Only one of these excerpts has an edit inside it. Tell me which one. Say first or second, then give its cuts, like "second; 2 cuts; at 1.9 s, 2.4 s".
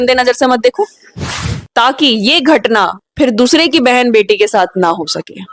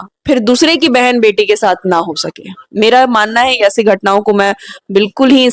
first; 1 cut; at 1.6 s